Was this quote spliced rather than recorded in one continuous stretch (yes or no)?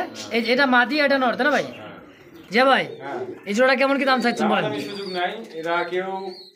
yes